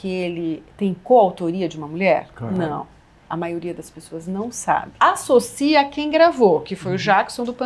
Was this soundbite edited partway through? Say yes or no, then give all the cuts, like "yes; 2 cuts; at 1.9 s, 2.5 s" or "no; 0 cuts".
no; 0 cuts